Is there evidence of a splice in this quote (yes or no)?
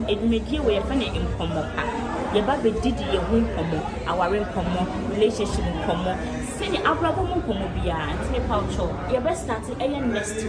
no